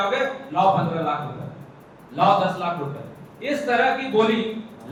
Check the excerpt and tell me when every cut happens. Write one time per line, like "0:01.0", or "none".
none

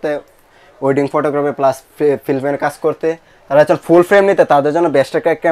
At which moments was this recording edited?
none

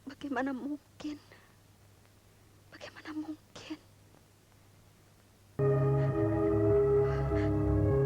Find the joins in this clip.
0:05.6

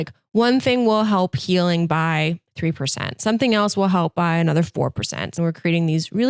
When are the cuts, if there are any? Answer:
0:05.3

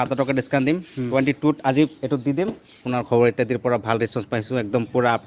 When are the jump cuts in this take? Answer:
0:02.7

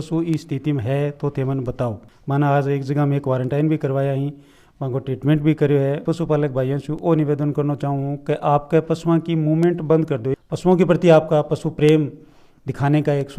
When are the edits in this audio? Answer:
0:02.1
0:06.0
0:10.3

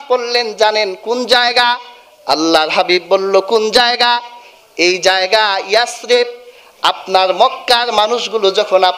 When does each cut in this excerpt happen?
none

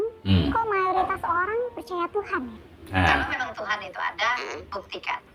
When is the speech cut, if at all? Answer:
0:03.3

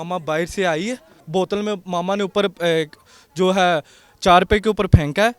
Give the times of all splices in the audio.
0:01.1

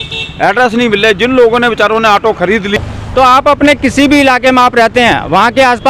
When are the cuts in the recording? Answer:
0:02.8

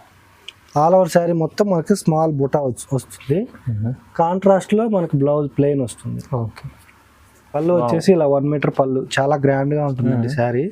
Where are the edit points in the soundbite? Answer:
0:07.6

